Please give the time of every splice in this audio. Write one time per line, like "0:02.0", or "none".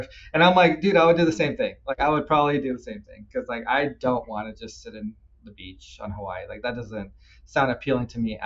none